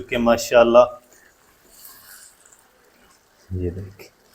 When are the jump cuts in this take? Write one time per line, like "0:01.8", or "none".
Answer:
none

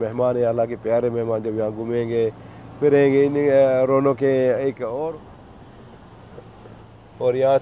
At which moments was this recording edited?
0:05.1

